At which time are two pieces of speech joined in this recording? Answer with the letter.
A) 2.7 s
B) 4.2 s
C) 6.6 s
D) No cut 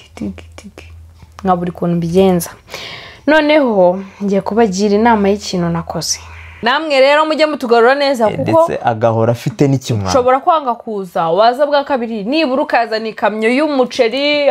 C